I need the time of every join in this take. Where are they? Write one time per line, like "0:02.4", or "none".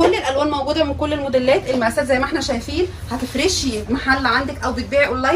none